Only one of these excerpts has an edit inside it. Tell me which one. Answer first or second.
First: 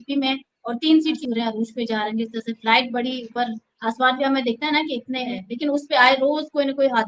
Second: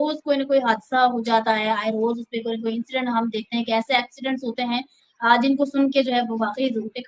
first